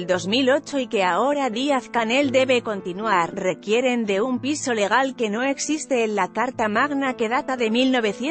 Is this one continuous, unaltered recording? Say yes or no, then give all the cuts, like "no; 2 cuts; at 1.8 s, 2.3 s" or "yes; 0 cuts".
yes; 0 cuts